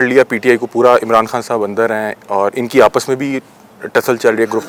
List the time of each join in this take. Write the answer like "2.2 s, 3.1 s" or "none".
none

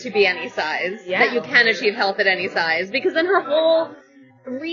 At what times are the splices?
none

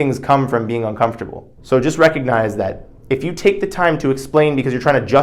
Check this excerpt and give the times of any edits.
1.5 s

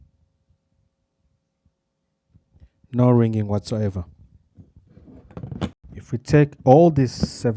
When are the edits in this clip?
5.8 s

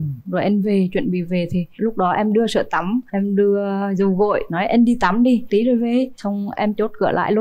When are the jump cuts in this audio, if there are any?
none

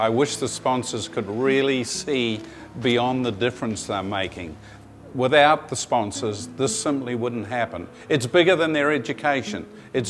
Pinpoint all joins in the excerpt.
4.7 s

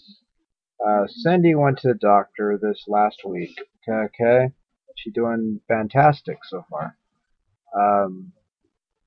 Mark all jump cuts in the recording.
none

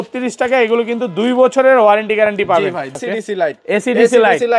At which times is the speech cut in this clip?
3.0 s

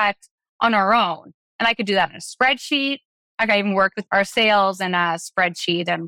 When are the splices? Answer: 4.0 s

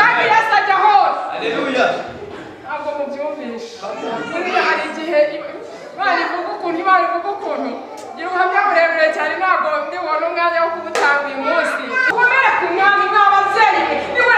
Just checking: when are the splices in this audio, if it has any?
12.1 s

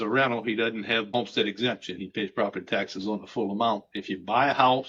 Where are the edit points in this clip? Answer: 1.1 s

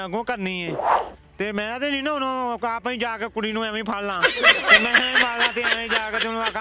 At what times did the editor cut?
none

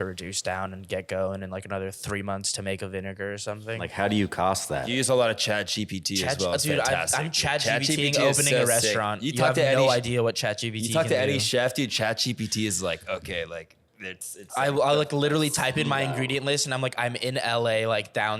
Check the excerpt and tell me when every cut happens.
3.9 s, 5.0 s

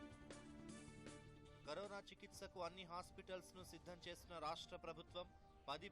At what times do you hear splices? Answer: 1.1 s

